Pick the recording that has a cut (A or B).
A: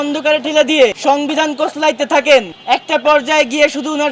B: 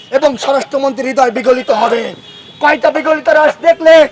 A